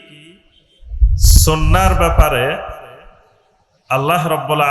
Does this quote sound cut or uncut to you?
uncut